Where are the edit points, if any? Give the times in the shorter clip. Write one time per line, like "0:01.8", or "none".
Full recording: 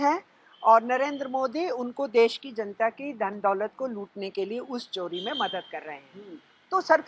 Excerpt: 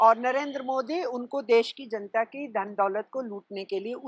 none